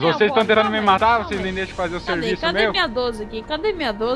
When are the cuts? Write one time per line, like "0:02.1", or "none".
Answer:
0:00.9